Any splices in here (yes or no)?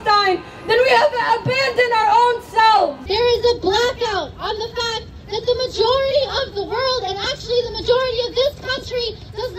yes